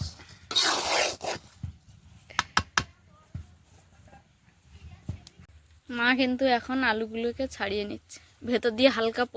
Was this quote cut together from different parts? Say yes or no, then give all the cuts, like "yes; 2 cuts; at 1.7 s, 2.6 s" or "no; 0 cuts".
yes; 1 cut; at 5.5 s